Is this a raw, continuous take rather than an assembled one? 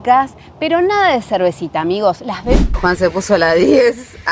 no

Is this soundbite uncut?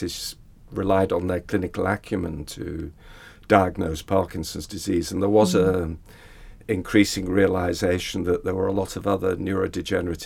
yes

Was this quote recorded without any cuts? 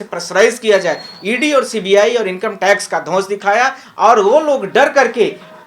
yes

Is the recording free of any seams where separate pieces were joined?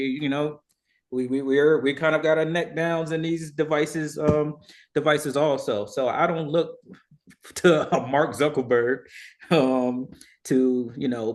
yes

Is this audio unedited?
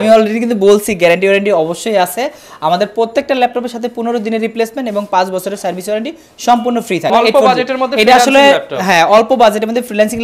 no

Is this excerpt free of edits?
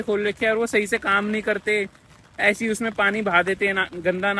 yes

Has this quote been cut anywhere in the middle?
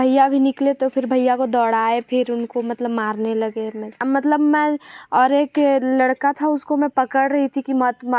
yes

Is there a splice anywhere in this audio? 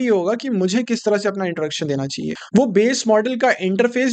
yes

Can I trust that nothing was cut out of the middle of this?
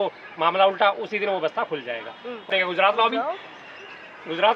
no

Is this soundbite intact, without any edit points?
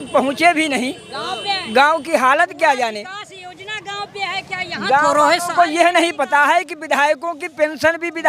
yes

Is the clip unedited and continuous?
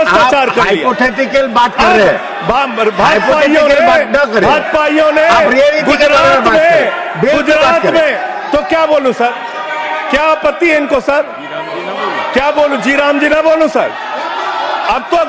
yes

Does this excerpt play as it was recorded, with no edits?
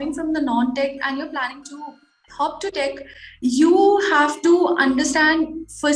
yes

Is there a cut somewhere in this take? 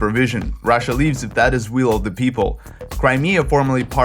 yes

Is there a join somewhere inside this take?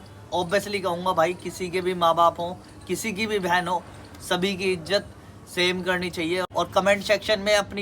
yes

